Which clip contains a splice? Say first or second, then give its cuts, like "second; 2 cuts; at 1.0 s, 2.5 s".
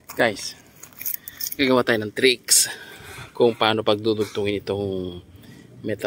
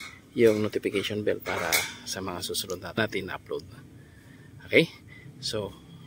second; 1 cut; at 3.0 s